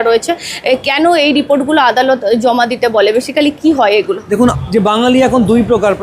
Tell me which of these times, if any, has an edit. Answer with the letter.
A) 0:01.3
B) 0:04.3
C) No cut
B